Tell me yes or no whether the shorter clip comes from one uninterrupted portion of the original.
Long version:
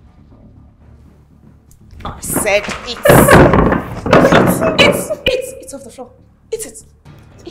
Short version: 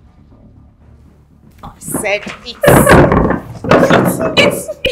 no